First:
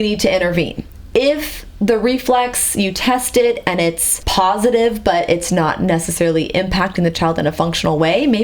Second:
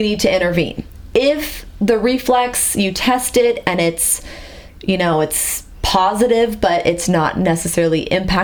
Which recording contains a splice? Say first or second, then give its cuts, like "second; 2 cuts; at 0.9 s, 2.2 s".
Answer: first; 1 cut; at 4.1 s